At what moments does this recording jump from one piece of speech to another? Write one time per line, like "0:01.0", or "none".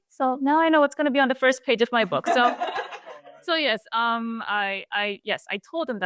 none

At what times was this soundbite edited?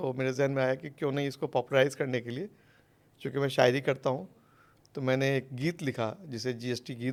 none

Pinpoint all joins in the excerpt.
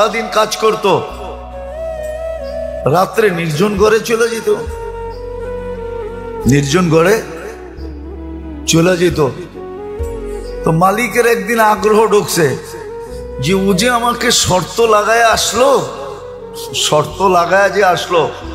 0:05.0
0:06.4
0:09.4
0:10.7

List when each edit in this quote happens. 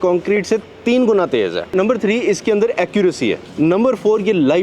0:01.8
0:03.4

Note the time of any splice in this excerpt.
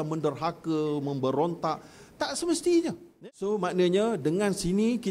0:03.1

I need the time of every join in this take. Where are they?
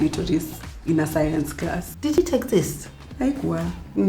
0:02.1

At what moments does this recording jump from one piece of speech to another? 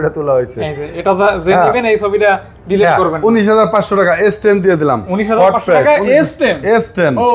none

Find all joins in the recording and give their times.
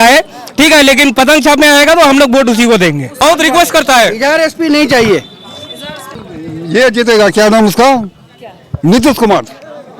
0:03.1
0:06.1

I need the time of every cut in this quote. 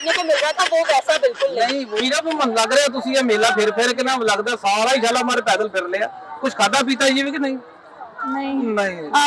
0:02.0

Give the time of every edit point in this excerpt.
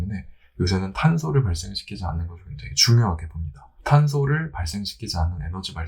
0:03.8

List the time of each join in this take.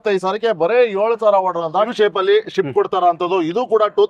0:01.9

